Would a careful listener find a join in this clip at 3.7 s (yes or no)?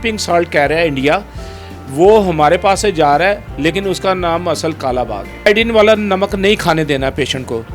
no